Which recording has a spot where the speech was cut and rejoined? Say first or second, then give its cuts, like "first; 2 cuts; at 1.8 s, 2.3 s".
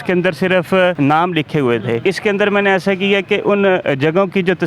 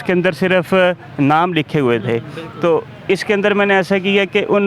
first; 2 cuts; at 0.9 s, 2.0 s